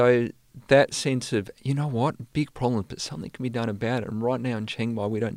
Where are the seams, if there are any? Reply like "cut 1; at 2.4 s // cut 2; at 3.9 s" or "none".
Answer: none